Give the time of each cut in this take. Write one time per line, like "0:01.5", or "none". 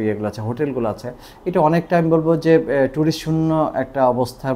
none